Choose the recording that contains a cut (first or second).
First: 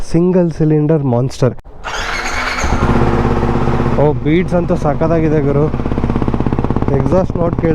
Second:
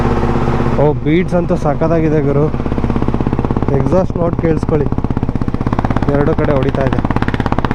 first